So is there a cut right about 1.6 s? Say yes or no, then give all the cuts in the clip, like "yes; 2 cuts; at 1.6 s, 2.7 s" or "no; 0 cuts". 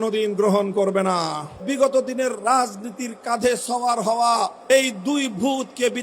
yes; 2 cuts; at 1.6 s, 4.6 s